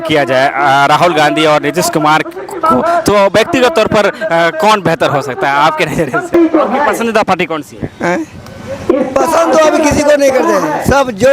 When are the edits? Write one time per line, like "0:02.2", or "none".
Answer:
0:06.3